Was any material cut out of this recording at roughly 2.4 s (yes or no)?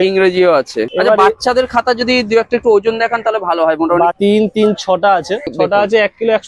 no